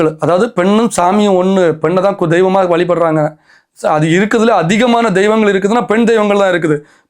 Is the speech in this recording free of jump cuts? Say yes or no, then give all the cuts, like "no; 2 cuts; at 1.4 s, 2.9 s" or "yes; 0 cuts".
yes; 0 cuts